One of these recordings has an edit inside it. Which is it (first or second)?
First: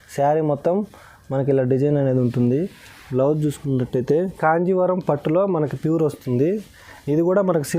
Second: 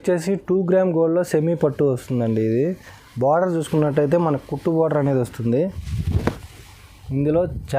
first